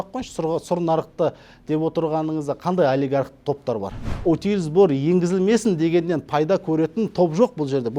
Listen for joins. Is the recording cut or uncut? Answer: cut